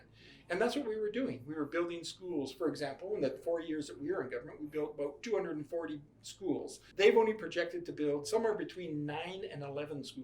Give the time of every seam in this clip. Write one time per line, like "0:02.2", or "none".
0:06.8